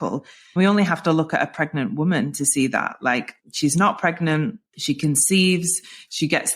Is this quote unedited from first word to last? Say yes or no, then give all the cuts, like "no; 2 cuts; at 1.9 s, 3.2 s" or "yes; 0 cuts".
no; 2 cuts; at 3.4 s, 4.7 s